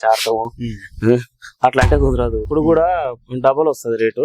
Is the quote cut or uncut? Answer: cut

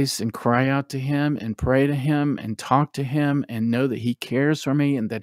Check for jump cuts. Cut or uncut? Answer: uncut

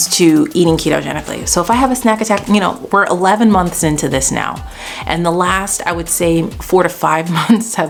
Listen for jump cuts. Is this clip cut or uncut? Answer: uncut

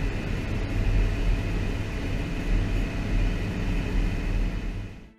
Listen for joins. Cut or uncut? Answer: uncut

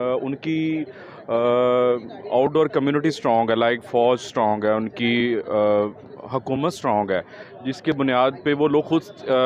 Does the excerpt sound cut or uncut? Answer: uncut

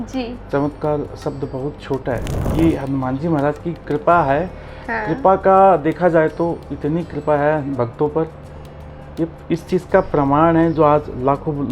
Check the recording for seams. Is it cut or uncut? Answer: cut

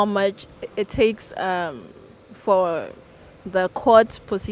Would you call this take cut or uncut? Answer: uncut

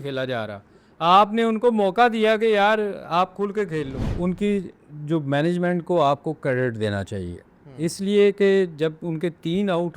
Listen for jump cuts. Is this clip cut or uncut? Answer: cut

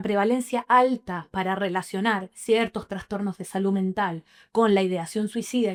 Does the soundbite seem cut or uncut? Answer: uncut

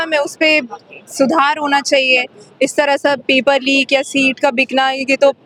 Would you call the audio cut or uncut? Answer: uncut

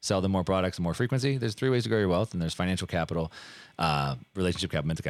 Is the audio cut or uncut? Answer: uncut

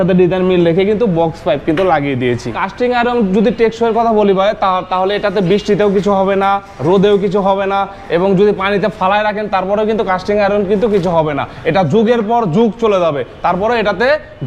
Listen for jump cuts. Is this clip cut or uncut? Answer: cut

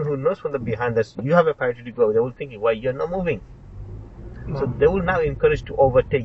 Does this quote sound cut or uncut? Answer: uncut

